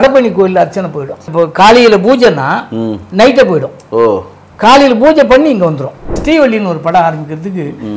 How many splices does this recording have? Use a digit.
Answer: 3